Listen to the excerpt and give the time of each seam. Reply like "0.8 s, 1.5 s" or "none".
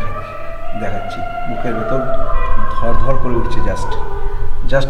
none